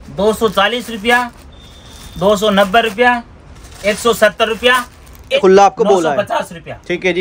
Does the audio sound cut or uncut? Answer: cut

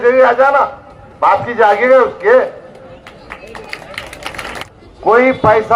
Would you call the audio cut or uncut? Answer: cut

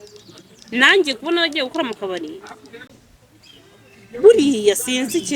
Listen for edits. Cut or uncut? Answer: cut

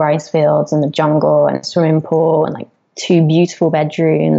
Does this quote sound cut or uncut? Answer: uncut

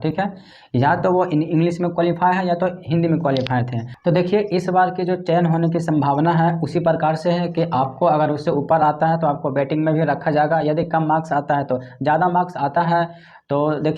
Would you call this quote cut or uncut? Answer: cut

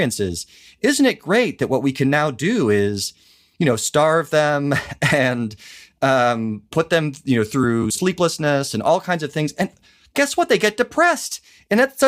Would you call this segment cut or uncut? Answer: uncut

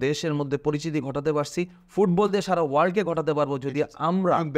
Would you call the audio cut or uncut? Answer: uncut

